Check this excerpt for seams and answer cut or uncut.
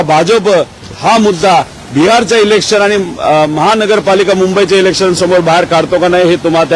uncut